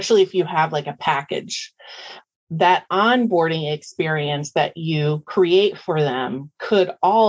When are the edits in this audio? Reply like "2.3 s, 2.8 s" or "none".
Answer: none